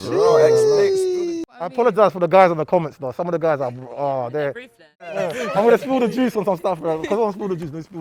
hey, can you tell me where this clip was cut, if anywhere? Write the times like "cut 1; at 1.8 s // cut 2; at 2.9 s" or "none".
cut 1; at 1.4 s // cut 2; at 5.0 s